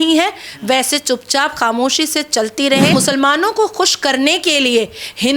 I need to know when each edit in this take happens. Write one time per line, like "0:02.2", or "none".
0:02.9